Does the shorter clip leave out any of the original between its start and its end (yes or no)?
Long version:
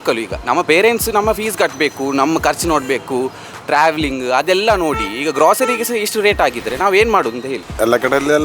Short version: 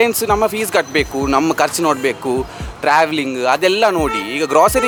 no